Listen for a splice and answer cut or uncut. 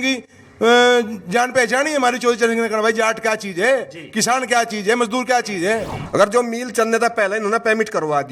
cut